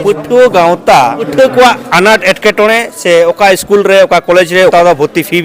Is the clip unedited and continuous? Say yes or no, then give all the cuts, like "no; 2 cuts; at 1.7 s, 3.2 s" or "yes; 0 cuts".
no; 2 cuts; at 1.2 s, 4.7 s